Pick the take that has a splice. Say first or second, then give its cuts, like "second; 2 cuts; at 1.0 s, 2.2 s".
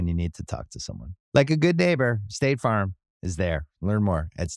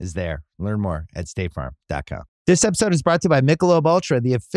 second; 1 cut; at 2.3 s